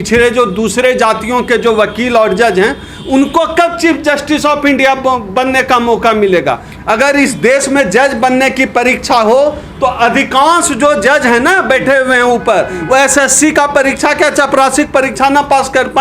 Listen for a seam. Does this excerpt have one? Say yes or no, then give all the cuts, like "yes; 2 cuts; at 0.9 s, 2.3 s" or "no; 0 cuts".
yes; 1 cut; at 6.7 s